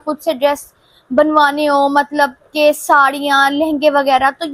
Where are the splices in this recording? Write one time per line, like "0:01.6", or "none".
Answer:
none